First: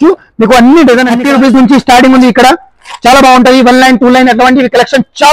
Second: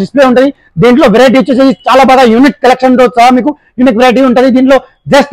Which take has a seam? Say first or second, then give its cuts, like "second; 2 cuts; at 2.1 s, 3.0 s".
first; 1 cut; at 1.2 s